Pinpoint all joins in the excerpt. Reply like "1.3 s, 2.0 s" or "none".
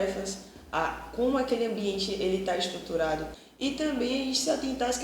3.3 s